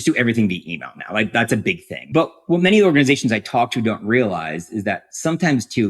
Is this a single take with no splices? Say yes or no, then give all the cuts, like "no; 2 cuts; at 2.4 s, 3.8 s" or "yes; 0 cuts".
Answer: no; 1 cut; at 1.9 s